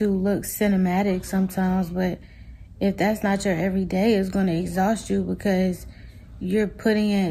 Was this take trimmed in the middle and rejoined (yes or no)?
no